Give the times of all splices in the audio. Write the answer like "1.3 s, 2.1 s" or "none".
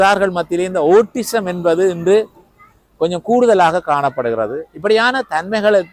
none